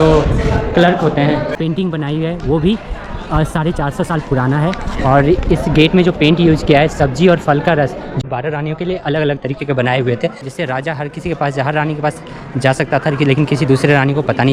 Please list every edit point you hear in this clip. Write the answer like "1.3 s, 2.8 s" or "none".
1.5 s, 8.2 s, 10.4 s